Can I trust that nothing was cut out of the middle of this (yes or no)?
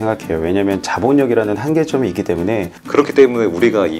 no